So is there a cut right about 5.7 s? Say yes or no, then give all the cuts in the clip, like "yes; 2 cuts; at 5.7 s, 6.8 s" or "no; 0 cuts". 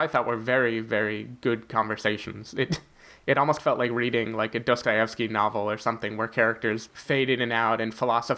no; 1 cut; at 6.9 s